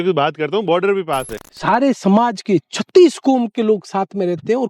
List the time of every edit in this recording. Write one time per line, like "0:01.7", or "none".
0:01.3